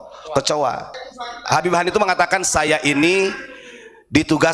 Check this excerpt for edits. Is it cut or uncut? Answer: cut